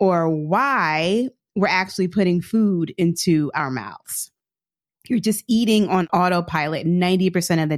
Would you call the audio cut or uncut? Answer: cut